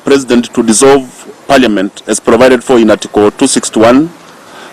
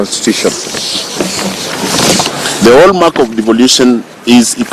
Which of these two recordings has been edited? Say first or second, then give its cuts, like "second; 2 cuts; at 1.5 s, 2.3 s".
second; 1 cut; at 2.4 s